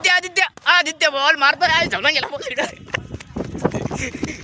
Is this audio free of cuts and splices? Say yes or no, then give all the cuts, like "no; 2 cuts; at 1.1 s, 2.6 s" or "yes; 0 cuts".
yes; 0 cuts